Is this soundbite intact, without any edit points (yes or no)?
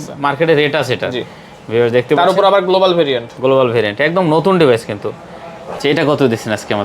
no